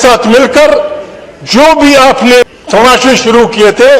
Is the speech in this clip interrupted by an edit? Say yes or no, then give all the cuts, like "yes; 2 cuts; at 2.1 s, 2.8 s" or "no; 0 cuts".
yes; 1 cut; at 2.4 s